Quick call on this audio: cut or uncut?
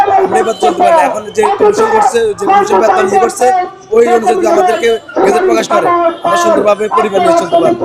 uncut